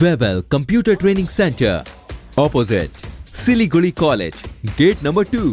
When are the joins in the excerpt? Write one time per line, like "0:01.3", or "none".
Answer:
none

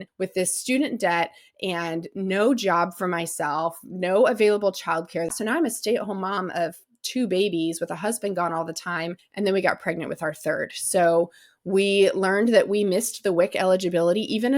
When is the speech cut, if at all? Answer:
0:05.3
0:09.2

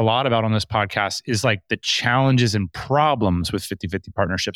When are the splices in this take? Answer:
none

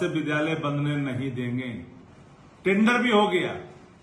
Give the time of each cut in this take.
none

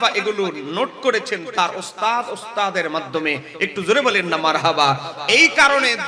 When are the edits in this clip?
none

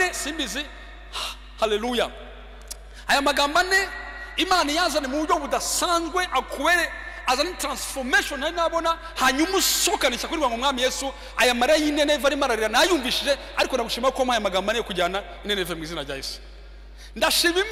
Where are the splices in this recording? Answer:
none

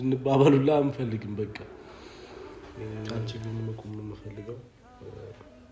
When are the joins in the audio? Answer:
0:03.1

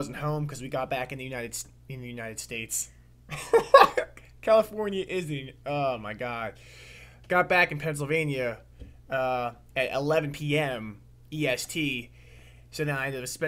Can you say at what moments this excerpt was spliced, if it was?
none

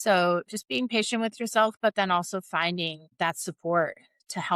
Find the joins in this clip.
0:03.1

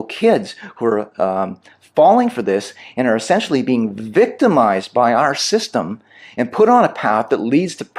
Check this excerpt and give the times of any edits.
none

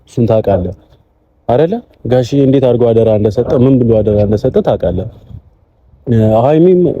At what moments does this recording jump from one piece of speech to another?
none

